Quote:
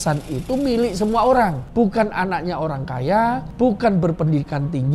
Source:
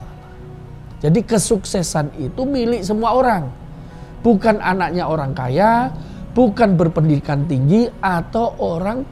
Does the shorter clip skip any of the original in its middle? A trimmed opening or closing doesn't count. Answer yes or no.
yes